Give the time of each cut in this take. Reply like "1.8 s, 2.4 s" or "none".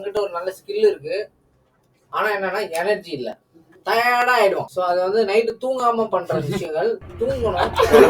4.7 s